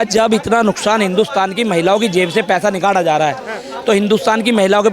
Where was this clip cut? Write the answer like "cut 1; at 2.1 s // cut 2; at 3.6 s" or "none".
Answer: none